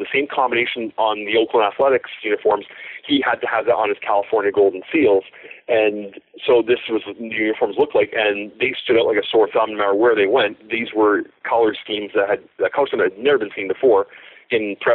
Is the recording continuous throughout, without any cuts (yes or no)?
yes